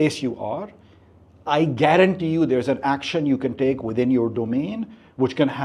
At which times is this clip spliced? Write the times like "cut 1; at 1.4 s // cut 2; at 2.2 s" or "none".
none

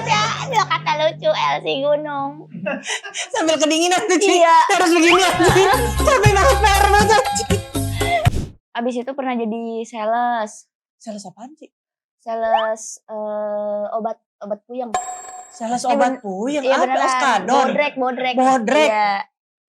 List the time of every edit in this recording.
cut 1; at 8.3 s

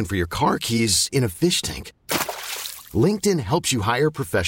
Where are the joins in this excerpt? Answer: none

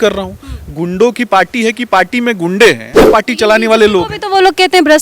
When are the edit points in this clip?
cut 1; at 3.1 s

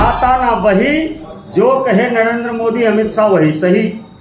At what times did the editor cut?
none

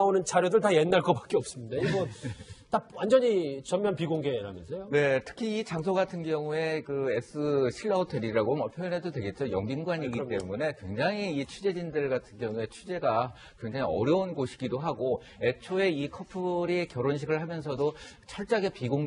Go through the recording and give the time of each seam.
none

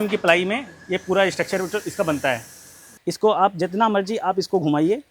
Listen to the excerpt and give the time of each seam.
cut 1; at 2.9 s

